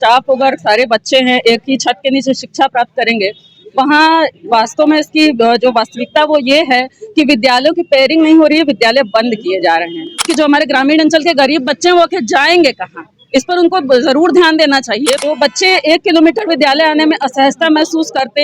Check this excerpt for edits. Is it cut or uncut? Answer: cut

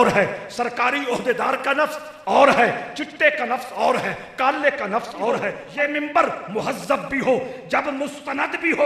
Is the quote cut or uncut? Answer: cut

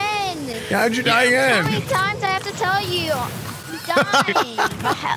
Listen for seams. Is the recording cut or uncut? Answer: uncut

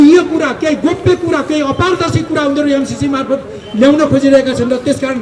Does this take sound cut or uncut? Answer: uncut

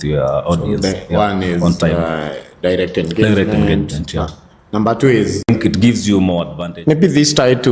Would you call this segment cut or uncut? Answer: cut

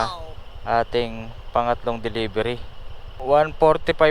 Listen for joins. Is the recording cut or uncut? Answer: cut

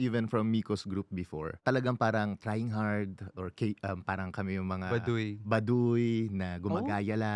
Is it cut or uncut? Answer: uncut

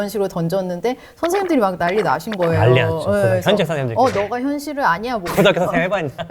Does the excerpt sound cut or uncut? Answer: uncut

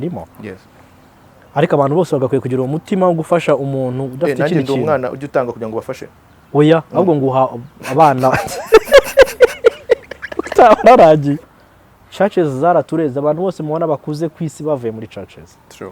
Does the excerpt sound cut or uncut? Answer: cut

